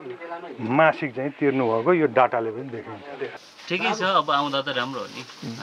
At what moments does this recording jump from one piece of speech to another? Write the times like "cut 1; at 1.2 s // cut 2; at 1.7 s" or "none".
cut 1; at 3.2 s